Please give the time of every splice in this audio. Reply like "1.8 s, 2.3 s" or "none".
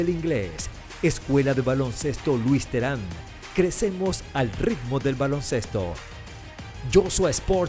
none